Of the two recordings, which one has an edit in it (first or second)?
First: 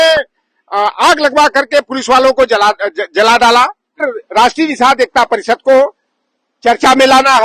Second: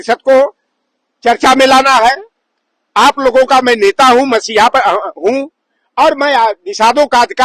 first